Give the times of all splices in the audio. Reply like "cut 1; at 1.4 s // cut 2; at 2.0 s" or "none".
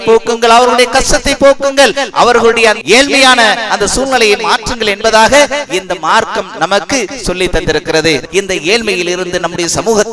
cut 1; at 2.8 s // cut 2; at 8.2 s